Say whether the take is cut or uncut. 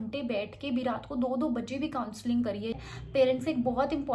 cut